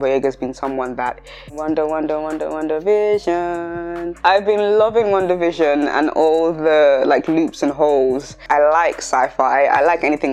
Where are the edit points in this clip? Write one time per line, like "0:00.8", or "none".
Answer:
0:01.5
0:08.4